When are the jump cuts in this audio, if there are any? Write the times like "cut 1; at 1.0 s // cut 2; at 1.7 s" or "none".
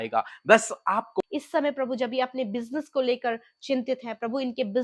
cut 1; at 1.2 s